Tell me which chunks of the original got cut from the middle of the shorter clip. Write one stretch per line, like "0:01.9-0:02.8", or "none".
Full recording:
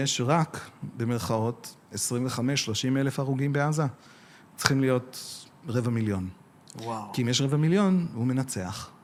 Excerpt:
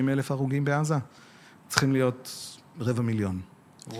none

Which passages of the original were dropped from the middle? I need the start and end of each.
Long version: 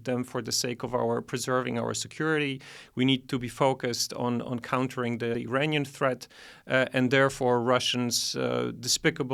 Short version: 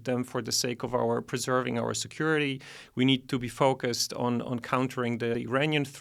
none

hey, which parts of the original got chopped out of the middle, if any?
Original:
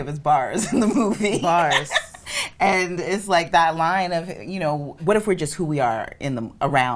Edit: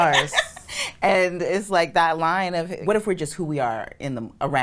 0:04.3-0:04.9

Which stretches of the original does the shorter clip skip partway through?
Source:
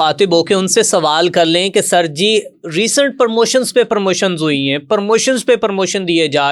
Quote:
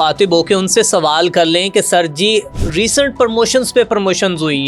none

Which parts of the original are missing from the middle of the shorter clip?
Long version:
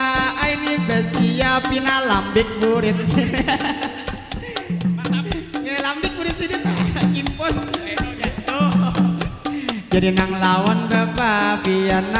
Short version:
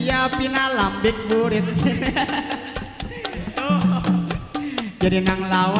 0:04.7-0:08.3

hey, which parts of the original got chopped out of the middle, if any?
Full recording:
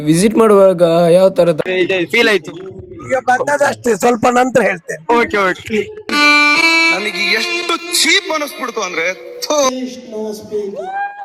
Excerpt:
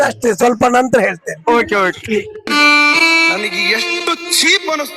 none

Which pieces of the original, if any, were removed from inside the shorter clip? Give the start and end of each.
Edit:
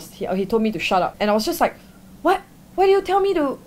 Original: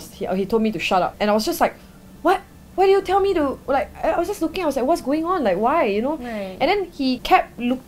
none

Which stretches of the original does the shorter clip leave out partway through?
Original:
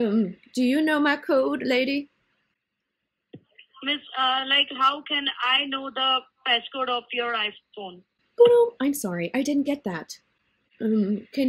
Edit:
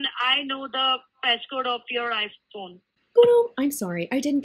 none

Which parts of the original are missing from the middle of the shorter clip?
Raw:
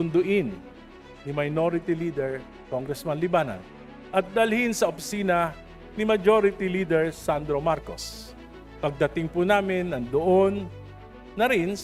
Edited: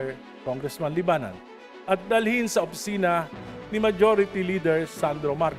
none

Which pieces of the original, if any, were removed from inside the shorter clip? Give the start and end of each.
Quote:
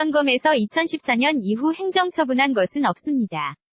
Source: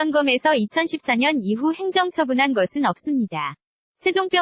none

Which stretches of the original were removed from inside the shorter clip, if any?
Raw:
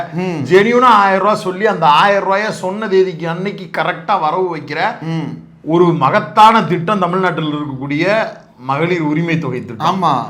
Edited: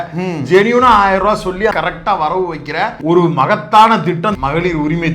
0:01.7-0:03.8
0:05.0-0:05.6
0:07.0-0:08.6

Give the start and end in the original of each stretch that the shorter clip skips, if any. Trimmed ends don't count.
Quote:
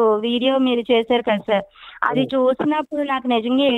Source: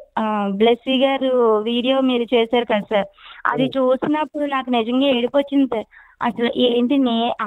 none

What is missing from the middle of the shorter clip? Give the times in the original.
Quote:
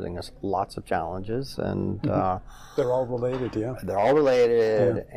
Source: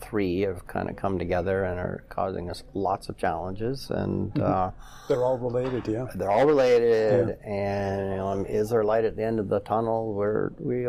none

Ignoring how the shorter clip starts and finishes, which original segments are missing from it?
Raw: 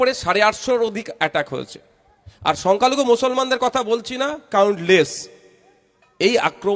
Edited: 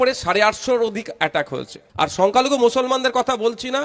0:01.8-0:02.2

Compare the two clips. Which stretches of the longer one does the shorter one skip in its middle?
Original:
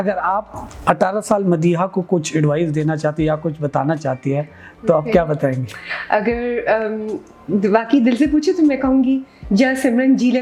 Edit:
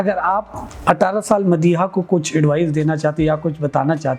none

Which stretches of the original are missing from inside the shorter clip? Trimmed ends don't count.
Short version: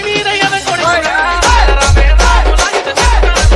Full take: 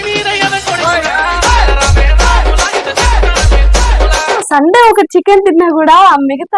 none

